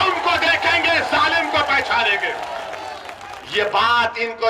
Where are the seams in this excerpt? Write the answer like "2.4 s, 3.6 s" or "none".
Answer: none